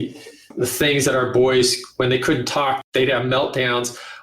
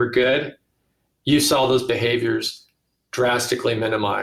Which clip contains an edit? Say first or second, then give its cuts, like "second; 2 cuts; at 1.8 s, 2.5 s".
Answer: first; 1 cut; at 2.8 s